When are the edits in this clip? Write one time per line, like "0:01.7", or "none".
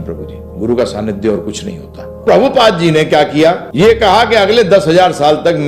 0:02.2
0:03.7